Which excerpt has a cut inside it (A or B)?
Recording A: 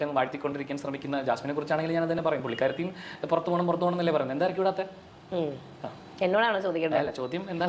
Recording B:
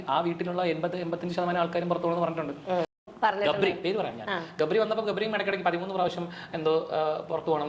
B